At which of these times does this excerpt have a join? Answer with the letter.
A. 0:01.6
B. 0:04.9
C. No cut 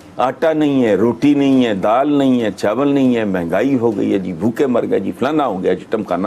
C